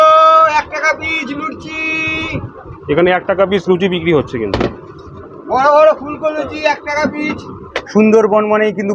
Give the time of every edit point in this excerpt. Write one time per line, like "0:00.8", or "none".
0:07.8